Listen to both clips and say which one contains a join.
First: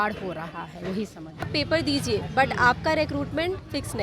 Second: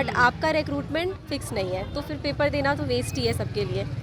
first; 1 cut; at 1.5 s

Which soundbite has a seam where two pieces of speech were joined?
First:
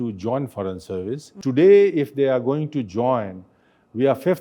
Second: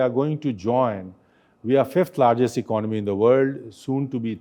first; 1 cut; at 1.3 s

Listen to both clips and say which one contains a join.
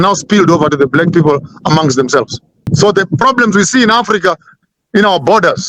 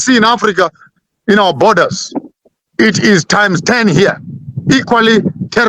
first; 1 cut; at 2.6 s

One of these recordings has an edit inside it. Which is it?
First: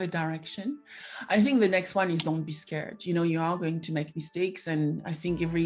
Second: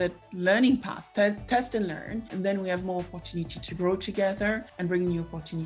second; 2 cuts; at 2.3 s, 4.7 s

